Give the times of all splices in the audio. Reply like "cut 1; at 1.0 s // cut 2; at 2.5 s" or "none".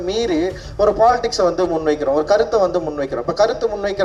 none